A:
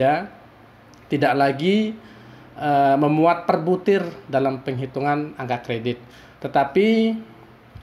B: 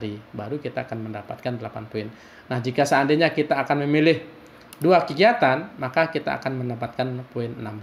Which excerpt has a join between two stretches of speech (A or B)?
B